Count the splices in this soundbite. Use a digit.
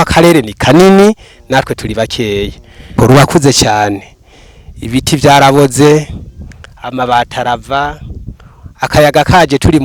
1